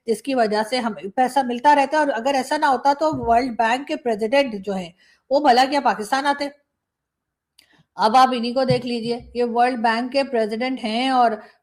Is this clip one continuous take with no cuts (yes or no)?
yes